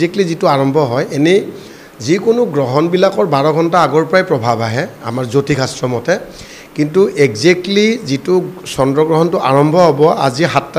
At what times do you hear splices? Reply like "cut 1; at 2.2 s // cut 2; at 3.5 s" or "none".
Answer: none